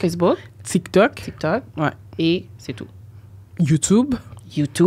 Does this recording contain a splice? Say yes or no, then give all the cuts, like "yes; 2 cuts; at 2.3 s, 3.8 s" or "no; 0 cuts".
no; 0 cuts